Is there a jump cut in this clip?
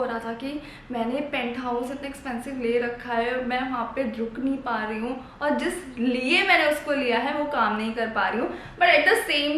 no; 0 cuts

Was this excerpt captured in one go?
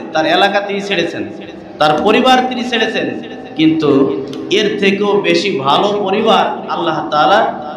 yes; 0 cuts

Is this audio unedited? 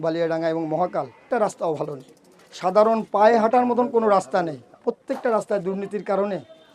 no; 2 cuts; at 1.2 s, 4.7 s

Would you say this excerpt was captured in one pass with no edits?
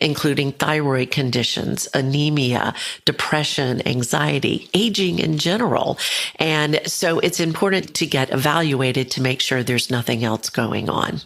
yes; 0 cuts

